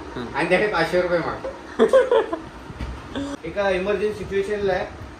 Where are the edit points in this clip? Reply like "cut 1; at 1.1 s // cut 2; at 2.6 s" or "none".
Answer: cut 1; at 3.3 s